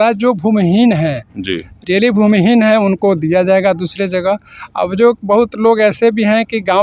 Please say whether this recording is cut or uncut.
uncut